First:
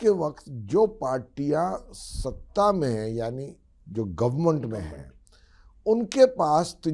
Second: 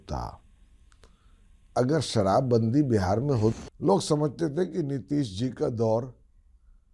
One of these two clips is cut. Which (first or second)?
second